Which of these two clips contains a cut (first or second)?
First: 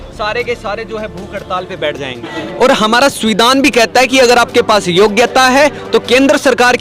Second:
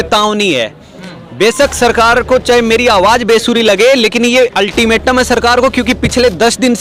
first